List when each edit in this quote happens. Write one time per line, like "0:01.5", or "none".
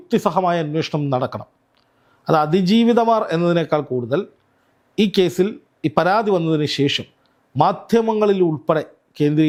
none

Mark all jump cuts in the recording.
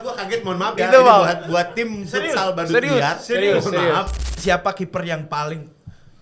0:04.3

